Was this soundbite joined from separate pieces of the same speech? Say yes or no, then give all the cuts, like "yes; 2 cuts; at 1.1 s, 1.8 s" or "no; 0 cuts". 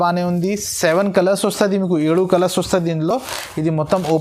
no; 0 cuts